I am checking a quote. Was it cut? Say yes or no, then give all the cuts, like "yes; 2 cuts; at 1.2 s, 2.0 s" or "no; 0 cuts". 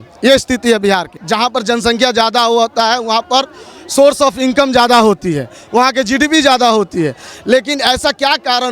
yes; 1 cut; at 1.1 s